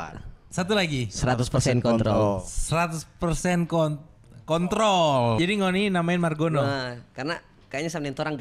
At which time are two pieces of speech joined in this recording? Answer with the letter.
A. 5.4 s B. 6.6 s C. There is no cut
A